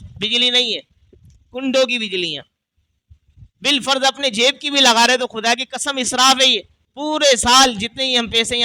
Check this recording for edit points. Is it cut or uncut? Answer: cut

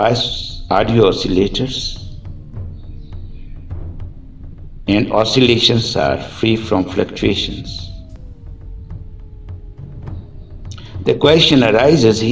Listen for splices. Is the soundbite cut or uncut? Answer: cut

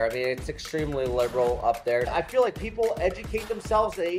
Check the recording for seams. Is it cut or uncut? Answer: cut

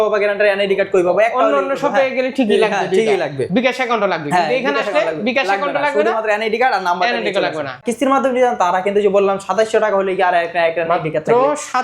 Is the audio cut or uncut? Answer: cut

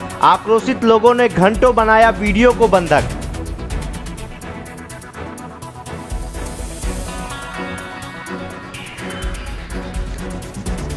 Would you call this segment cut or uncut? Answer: uncut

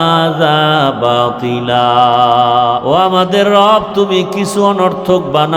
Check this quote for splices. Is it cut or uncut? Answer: cut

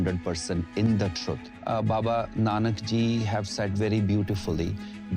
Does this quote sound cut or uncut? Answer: cut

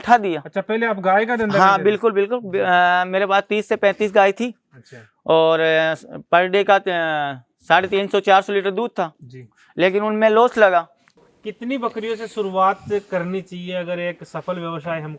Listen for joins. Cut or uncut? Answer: cut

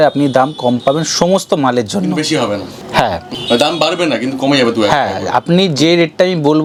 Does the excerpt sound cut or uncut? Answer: uncut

